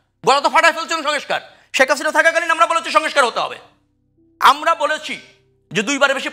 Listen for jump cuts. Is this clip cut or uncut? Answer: uncut